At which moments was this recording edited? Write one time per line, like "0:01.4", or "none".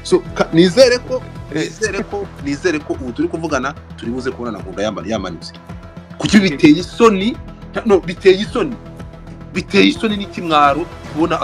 none